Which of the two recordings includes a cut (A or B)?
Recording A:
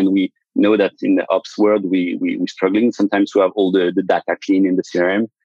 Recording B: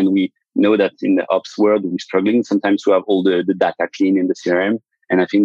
B